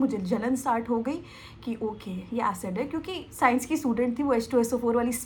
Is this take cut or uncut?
uncut